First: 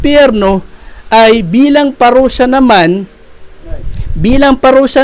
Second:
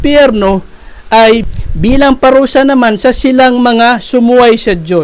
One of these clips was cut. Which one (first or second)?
second